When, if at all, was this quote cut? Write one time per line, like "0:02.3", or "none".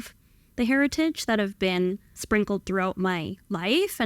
0:02.1